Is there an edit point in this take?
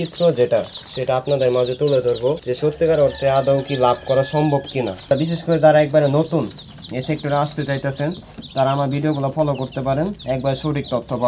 yes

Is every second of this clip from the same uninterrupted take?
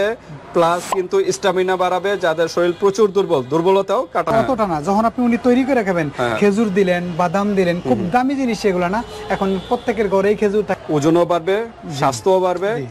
no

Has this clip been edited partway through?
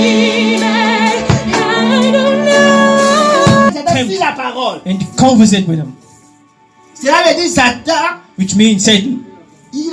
yes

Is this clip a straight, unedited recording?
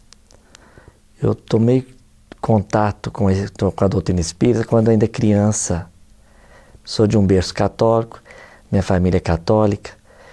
yes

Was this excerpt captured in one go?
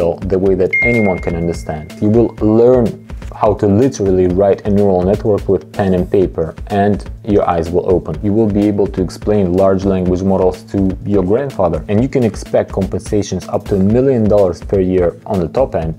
no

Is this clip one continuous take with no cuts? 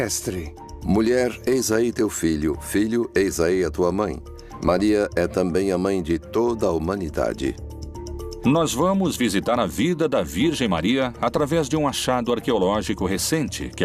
no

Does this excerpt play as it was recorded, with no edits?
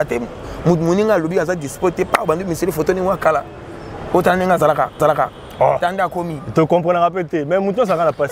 yes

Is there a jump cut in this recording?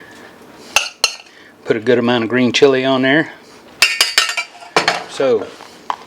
yes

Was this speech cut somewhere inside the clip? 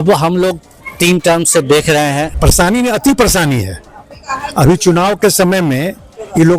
yes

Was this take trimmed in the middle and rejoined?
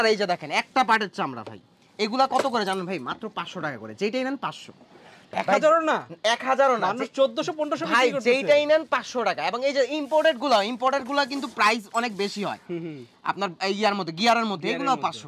no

